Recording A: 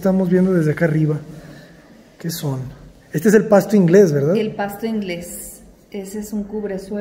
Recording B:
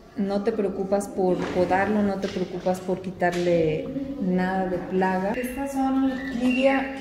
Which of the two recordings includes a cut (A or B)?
B